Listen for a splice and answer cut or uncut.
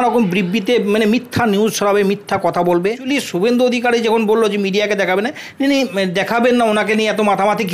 cut